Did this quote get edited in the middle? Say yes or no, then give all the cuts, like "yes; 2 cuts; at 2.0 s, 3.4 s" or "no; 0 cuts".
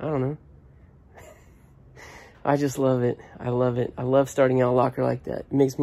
no; 0 cuts